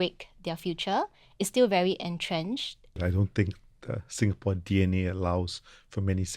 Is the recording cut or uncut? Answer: cut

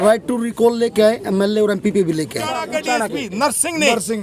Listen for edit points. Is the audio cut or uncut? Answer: cut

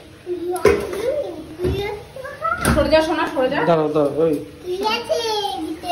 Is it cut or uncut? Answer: uncut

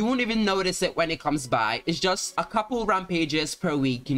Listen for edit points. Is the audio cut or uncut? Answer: uncut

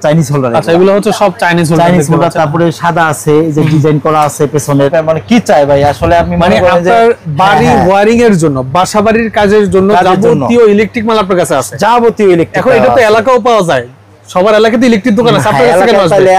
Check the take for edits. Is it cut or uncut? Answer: cut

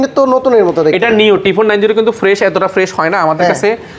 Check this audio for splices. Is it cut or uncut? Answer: uncut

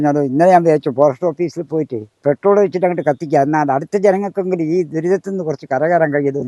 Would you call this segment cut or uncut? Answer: uncut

